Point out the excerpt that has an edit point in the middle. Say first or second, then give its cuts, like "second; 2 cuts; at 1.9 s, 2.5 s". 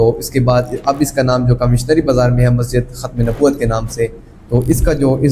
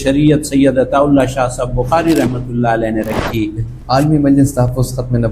second; 1 cut; at 3.7 s